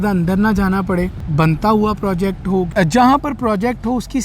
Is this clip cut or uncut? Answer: cut